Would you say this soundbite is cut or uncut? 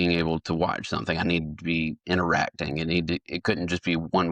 uncut